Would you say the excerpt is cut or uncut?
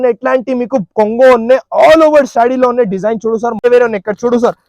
cut